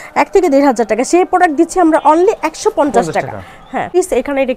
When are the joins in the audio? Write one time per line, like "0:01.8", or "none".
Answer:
none